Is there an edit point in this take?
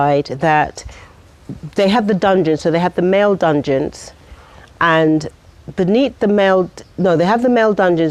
no; 0 cuts

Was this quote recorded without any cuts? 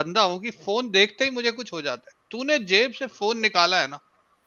yes; 0 cuts

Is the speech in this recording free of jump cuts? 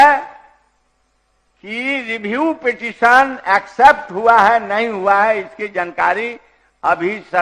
yes; 0 cuts

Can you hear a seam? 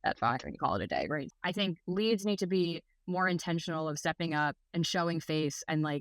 yes; 1 cut; at 1.3 s

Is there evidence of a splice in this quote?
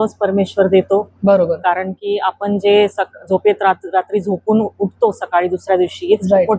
no; 0 cuts

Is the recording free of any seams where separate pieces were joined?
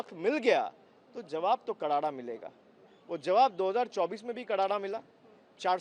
yes; 0 cuts

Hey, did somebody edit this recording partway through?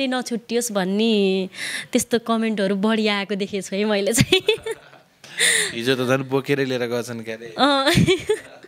no; 0 cuts

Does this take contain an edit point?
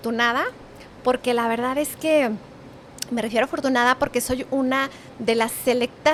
no; 0 cuts

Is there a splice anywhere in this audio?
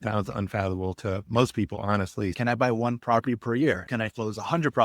yes; 2 cuts; at 2.4 s, 3.9 s

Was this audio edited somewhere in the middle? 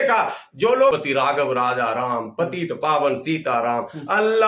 yes; 1 cut; at 0.9 s

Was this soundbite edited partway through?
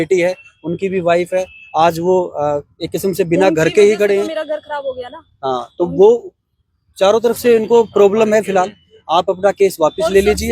no; 0 cuts

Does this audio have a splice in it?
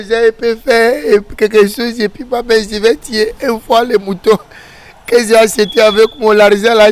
no; 0 cuts

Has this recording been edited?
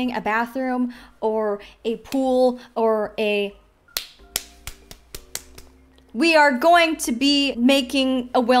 yes; 2 cuts; at 3.7 s, 7.5 s

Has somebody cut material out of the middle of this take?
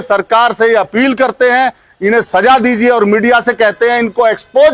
no; 0 cuts

